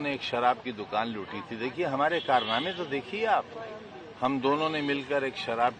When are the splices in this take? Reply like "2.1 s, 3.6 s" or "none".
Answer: none